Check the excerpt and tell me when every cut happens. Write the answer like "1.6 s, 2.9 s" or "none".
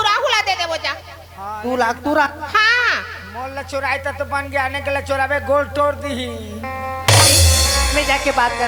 none